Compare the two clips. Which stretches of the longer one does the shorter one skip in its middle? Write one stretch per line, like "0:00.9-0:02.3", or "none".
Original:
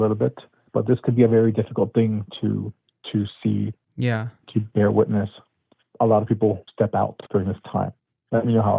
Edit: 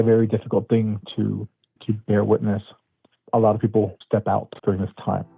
0:02.9-0:04.3